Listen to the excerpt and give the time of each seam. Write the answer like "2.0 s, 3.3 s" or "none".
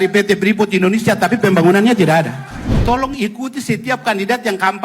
2.8 s